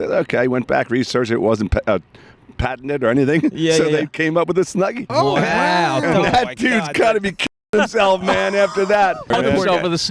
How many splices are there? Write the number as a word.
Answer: two